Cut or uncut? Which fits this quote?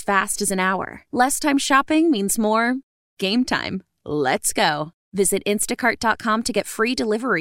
uncut